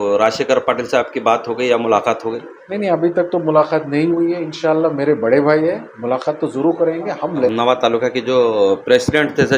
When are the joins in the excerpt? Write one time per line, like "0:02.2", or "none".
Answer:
0:07.5